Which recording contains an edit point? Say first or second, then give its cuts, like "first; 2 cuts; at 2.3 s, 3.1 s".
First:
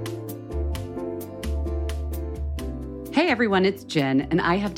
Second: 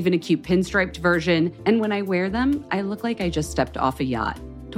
first; 1 cut; at 2.5 s